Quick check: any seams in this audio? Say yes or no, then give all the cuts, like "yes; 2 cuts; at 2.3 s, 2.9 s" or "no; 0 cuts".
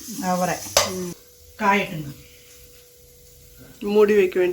yes; 1 cut; at 1.2 s